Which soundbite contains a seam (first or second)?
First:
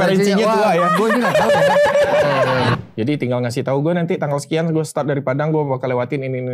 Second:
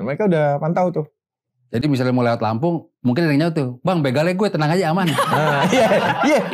first